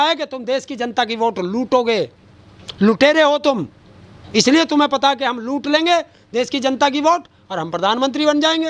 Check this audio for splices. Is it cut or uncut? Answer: uncut